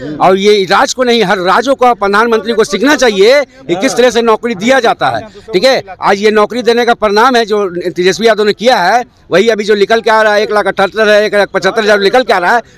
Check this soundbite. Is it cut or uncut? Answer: uncut